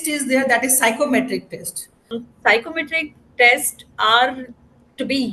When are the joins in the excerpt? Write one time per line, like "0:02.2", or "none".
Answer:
0:02.2